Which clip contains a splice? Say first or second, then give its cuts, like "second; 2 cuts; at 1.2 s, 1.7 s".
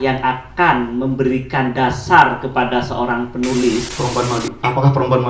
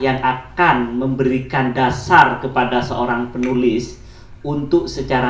first; 1 cut; at 3.9 s